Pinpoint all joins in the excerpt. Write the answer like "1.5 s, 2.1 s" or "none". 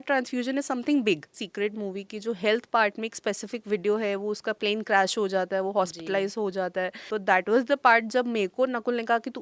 1.4 s, 7.0 s